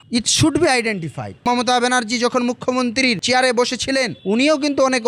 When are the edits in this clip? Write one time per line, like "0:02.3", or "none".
0:01.4

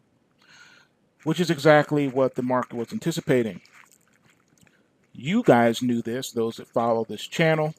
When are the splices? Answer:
0:05.8

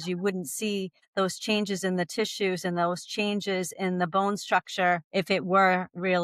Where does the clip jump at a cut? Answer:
none

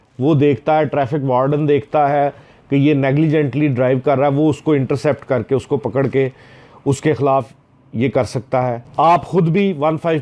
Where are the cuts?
0:08.8

